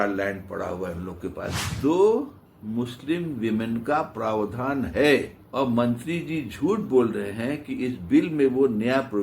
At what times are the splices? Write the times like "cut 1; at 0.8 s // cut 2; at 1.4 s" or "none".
cut 1; at 1.6 s